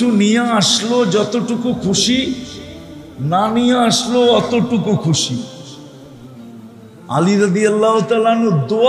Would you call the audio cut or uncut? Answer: cut